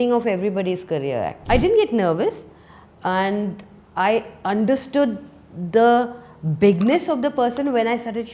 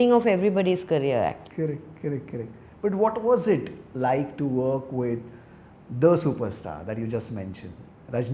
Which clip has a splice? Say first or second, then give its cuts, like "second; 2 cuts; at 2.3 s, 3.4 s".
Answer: first; 1 cut; at 1.4 s